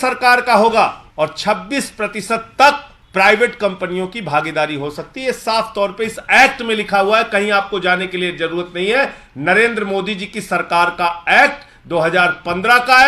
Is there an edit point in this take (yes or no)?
yes